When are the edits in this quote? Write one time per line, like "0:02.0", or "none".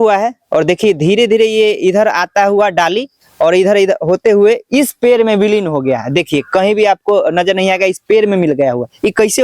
none